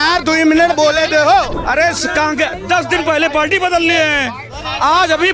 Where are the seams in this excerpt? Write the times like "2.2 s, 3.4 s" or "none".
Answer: 1.6 s

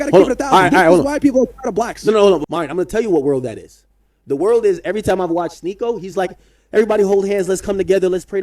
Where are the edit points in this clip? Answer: 2.4 s

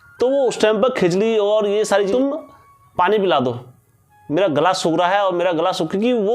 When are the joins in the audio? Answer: 2.1 s

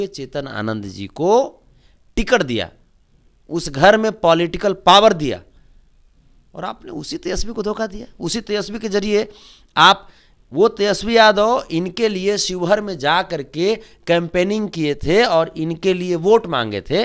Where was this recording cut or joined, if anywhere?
none

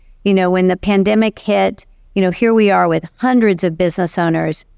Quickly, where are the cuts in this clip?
none

